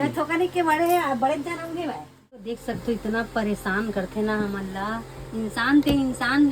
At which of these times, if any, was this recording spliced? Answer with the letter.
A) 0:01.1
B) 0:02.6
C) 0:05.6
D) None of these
B